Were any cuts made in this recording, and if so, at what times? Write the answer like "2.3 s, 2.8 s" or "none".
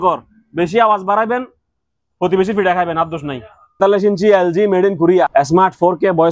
3.8 s, 5.3 s